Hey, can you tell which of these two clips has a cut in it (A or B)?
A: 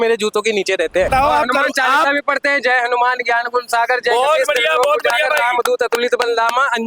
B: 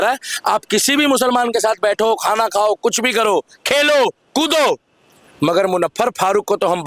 A